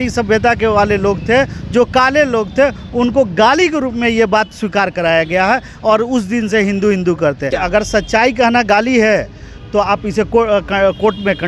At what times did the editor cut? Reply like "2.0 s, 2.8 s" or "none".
7.5 s

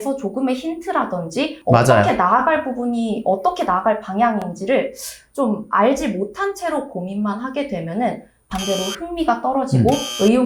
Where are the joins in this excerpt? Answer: none

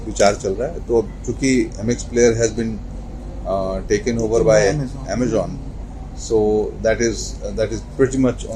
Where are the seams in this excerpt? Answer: none

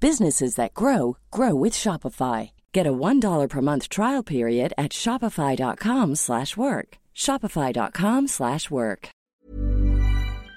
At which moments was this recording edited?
9.3 s

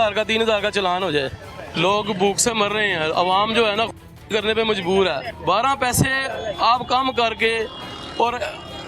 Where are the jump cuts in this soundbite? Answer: 1.7 s, 5.3 s

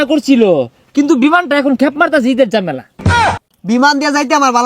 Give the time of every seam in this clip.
3.1 s

